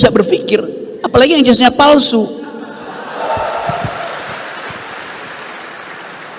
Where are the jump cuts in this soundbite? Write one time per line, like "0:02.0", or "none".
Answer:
0:03.2